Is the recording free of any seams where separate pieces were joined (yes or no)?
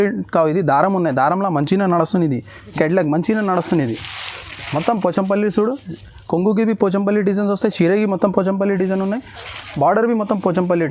no